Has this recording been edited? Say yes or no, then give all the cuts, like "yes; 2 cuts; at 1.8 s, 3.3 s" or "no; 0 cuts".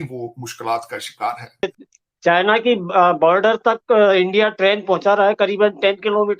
yes; 1 cut; at 1.8 s